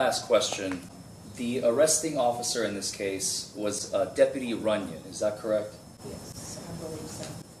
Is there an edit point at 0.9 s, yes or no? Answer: yes